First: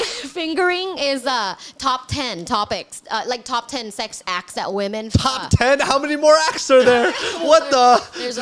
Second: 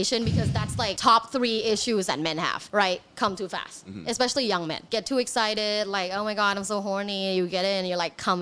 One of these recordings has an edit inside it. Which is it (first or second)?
second